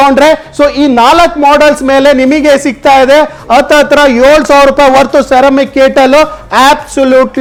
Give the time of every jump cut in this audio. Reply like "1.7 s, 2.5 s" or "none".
none